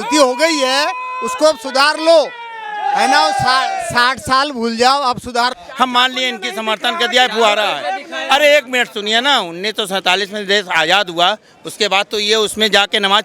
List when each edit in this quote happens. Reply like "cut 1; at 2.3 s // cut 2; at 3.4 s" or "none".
cut 1; at 5.6 s